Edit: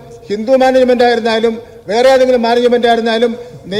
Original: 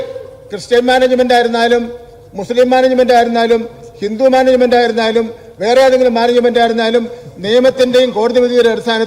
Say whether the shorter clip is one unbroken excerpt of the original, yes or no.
yes